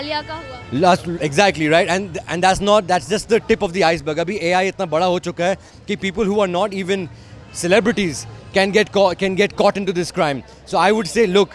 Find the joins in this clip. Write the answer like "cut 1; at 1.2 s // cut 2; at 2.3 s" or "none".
none